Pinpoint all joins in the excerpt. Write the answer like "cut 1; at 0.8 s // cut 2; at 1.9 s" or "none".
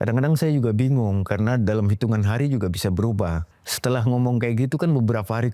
cut 1; at 3.5 s